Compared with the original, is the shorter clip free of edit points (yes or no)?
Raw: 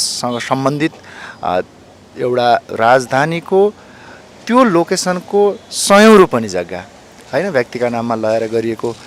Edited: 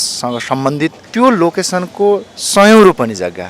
no